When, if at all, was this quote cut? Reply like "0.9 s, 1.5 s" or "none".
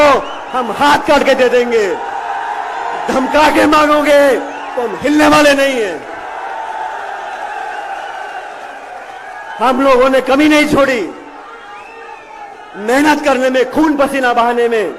none

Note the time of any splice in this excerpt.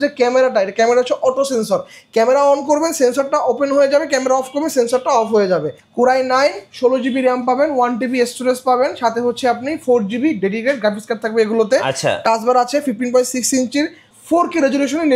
5.8 s, 10.4 s

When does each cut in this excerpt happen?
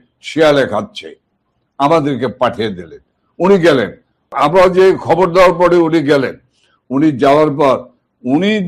4.3 s

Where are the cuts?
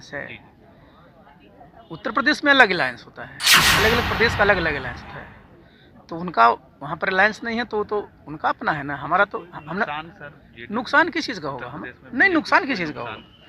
none

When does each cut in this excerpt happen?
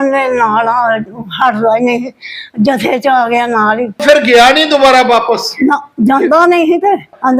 3.9 s

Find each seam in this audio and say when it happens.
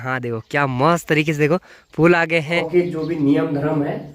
2.6 s

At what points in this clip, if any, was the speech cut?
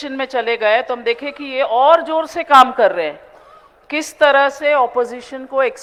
none

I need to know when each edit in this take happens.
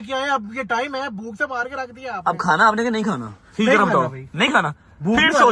none

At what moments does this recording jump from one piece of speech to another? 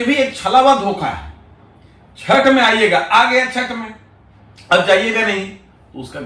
none

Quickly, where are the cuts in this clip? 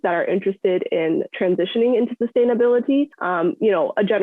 none

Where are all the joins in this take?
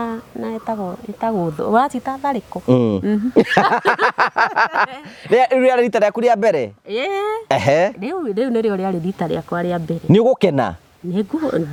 none

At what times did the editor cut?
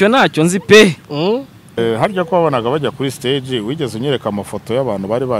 1.8 s

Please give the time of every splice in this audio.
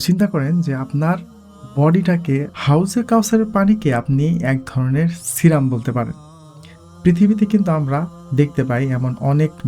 2.5 s

